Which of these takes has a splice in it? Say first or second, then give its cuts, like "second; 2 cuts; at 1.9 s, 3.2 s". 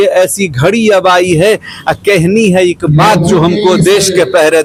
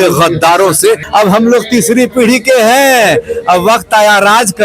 second; 1 cut; at 1.0 s